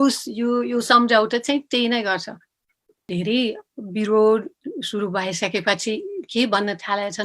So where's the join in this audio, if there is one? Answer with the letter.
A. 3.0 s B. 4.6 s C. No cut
A